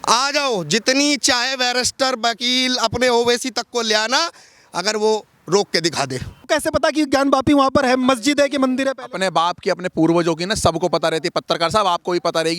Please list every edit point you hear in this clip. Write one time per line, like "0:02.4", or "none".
0:06.5